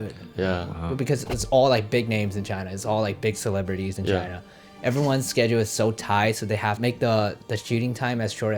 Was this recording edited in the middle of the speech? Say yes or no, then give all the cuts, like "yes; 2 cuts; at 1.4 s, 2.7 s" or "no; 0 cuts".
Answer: yes; 2 cuts; at 1.0 s, 6.8 s